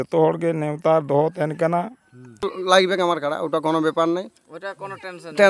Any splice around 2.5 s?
yes; 1 cut; at 2.5 s

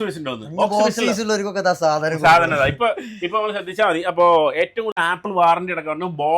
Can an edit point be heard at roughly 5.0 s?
yes; 1 cut; at 5.0 s

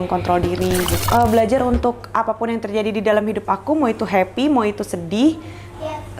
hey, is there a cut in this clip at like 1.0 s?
yes; 1 cut; at 1.0 s

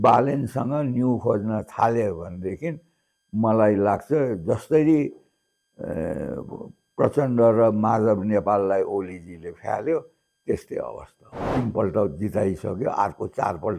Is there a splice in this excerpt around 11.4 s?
yes; 1 cut; at 11.4 s

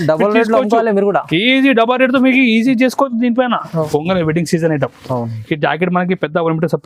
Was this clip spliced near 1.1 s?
no; 1 cut; at 3.9 s

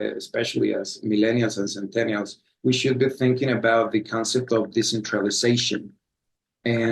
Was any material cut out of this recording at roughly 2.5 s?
no; 1 cut; at 1.0 s

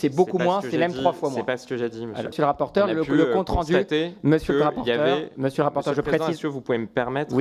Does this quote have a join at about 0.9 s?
no; 1 cut; at 2.3 s

